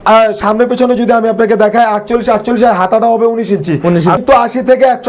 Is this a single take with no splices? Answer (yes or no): no